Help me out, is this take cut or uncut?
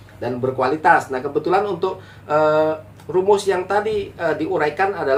uncut